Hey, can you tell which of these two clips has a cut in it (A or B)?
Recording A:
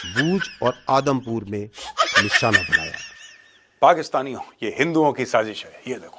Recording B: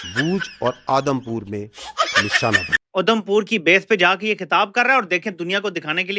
B